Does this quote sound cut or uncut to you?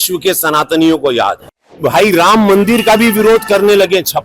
cut